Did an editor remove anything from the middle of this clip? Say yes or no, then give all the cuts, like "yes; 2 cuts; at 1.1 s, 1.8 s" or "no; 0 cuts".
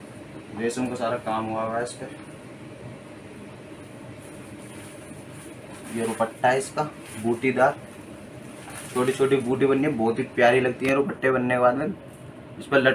no; 0 cuts